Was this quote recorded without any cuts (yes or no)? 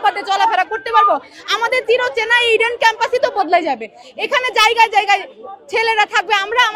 yes